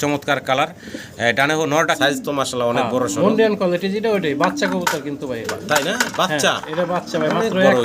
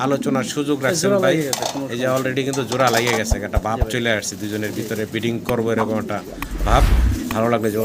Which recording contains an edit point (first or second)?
first